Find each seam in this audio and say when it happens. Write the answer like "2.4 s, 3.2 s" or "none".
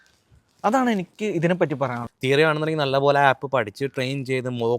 2.1 s